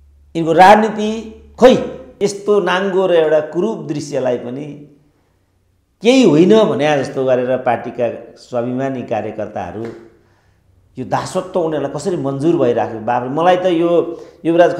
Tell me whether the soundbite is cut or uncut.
cut